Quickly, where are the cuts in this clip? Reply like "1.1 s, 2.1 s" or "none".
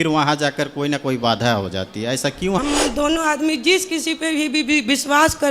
2.6 s